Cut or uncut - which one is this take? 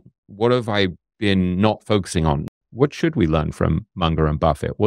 cut